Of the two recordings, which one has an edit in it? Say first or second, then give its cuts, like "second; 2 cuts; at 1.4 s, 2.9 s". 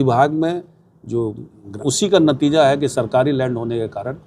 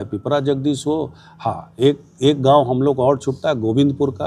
first; 1 cut; at 1.7 s